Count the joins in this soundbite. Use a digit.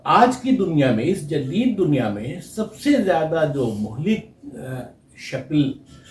0